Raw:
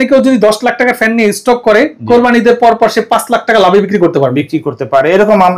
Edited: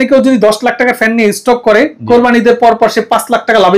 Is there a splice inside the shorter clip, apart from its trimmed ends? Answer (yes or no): no